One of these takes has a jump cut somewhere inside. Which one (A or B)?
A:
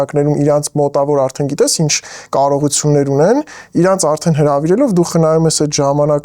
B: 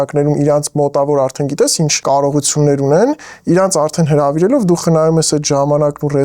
B